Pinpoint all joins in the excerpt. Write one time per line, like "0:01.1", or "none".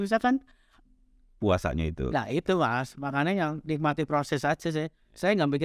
none